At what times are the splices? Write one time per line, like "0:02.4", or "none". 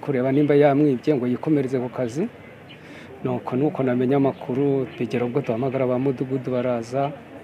none

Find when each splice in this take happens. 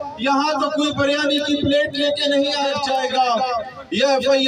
0:02.8

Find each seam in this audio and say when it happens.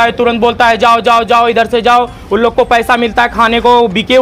none

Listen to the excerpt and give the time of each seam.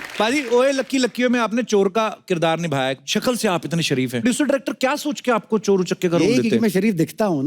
0:03.0
0:04.2

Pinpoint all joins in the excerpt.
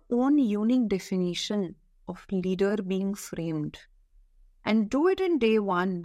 none

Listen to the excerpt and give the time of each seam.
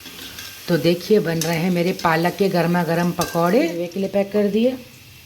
0:03.9

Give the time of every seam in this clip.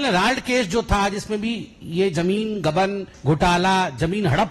0:03.1

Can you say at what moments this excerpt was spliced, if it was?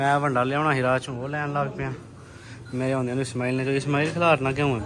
none

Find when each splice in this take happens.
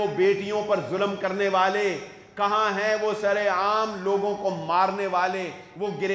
none

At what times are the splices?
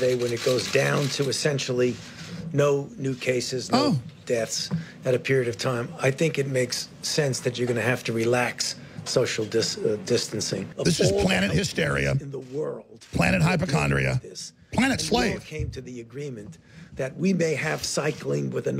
0:10.7

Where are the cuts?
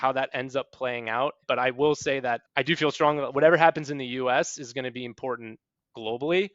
0:01.4
0:02.4

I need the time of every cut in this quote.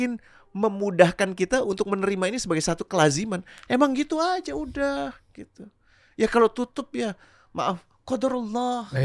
none

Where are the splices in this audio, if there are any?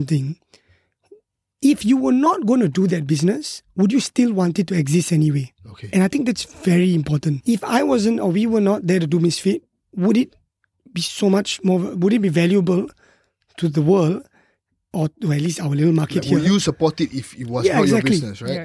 0:07.4

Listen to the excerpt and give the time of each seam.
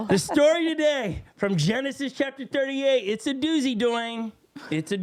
none

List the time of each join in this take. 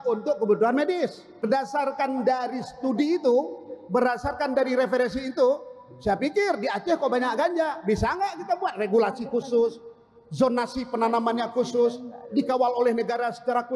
0:01.5

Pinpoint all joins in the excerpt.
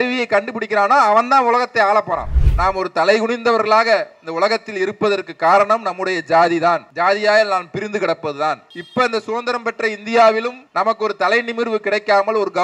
0:02.3
0:06.9
0:08.7
0:10.6

